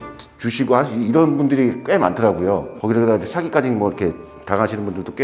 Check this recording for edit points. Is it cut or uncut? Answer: cut